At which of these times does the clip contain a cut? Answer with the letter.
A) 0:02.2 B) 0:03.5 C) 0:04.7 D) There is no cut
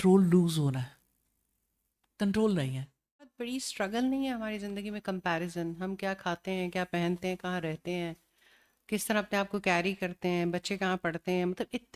B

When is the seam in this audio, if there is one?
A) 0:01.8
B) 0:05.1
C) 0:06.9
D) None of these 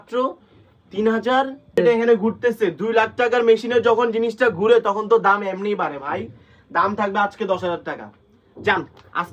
A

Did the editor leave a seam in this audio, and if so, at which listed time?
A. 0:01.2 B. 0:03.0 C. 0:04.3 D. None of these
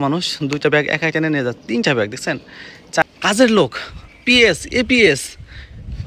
B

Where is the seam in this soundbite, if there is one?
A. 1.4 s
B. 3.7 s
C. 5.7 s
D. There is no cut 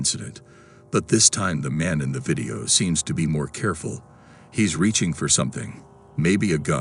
D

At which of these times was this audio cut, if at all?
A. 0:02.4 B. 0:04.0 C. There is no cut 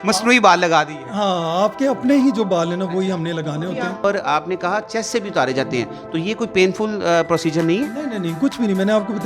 B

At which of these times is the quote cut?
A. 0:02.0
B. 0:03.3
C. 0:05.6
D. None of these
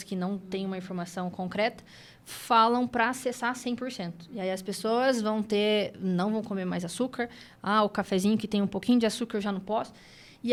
D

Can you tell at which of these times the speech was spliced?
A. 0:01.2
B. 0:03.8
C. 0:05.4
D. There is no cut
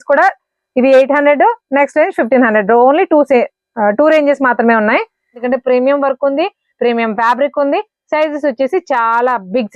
C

